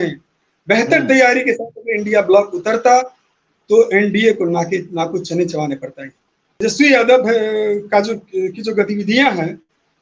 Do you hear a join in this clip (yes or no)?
yes